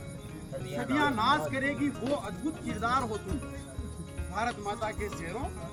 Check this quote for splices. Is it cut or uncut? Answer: uncut